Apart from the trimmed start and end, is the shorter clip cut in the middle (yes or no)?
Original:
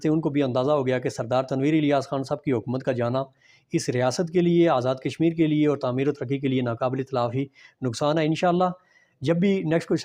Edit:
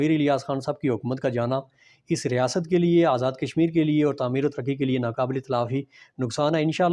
no